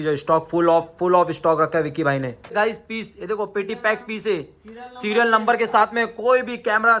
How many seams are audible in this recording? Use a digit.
1